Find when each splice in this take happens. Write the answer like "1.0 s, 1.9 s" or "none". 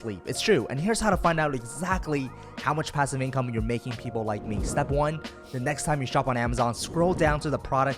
5.2 s